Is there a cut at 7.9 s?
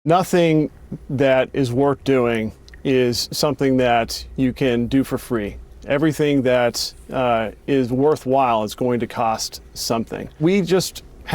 no; 1 cut; at 10.4 s

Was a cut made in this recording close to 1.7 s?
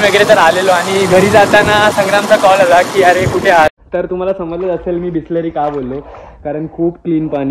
no; 1 cut; at 3.8 s

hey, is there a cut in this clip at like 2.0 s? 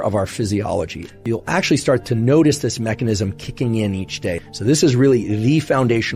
yes; 3 cuts; at 1.1 s, 2.0 s, 4.4 s

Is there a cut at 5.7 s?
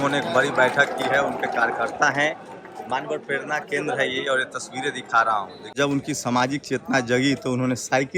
yes; 1 cut; at 5.7 s

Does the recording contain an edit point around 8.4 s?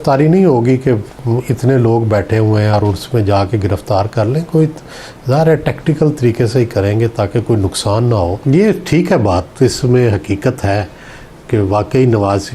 yes; 1 cut; at 8.4 s

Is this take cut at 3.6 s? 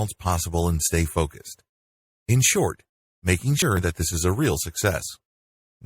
yes; 1 cut; at 3.6 s

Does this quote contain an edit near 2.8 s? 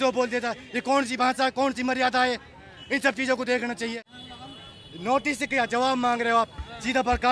no; 1 cut; at 4.0 s

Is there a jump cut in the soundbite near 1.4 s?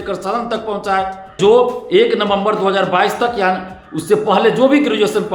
yes; 1 cut; at 1.4 s

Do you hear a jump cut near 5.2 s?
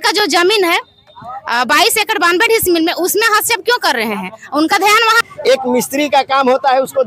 yes; 1 cut; at 5.2 s

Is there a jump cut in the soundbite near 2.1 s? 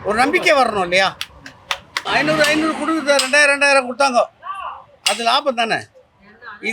yes; 1 cut; at 2.1 s

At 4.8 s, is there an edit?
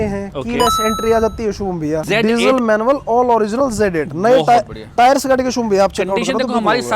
no; 1 cut; at 2.0 s

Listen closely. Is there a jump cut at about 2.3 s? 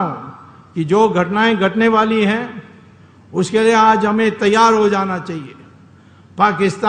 no; 0 cuts

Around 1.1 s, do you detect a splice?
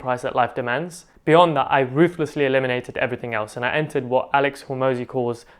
yes; 1 cut; at 1.1 s

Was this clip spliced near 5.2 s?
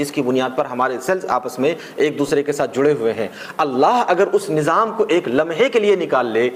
no; 0 cuts

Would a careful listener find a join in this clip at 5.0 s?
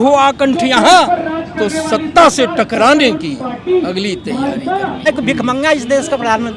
yes; 1 cut; at 5.0 s

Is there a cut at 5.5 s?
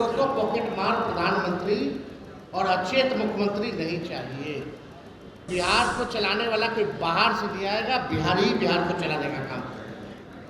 yes; 1 cut; at 5.5 s

